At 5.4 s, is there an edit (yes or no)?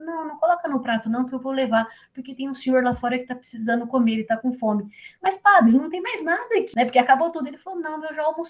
no